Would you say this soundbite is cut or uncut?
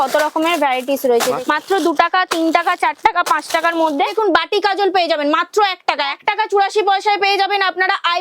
cut